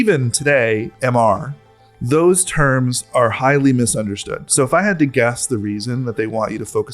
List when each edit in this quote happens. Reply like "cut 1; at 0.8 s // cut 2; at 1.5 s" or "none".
cut 1; at 0.9 s